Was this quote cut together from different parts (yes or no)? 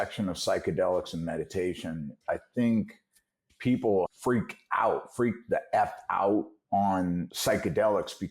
yes